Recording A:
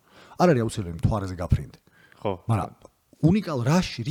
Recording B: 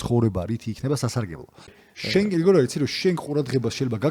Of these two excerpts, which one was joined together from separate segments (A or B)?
B